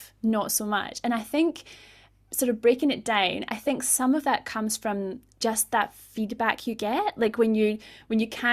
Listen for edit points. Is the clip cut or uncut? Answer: uncut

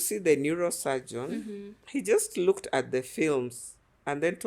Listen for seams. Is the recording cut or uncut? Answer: cut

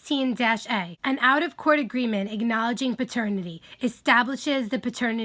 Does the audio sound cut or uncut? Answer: cut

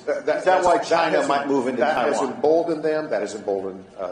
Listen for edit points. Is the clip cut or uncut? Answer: cut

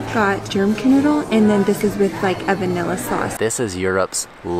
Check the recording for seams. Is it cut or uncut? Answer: cut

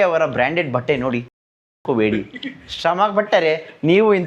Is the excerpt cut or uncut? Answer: uncut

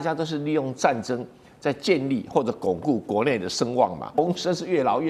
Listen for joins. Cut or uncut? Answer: cut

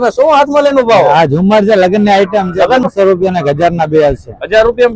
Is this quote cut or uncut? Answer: cut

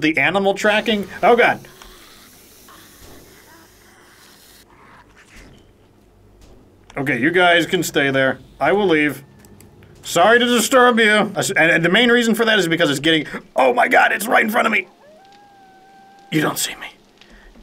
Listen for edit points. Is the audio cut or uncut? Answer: cut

